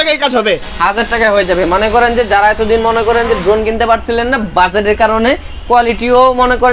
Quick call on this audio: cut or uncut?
uncut